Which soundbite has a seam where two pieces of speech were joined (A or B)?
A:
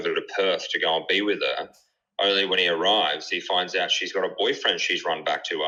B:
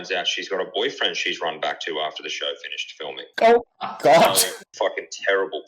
B